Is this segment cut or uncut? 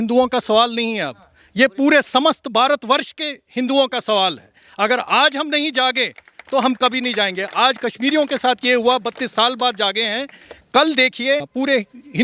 uncut